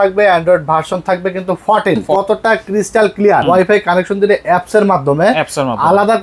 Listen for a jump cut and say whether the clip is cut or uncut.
cut